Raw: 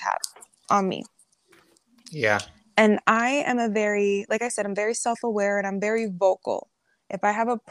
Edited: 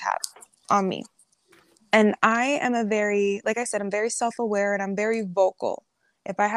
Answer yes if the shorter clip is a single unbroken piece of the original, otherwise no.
no